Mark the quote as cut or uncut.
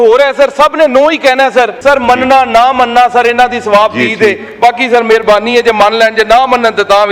cut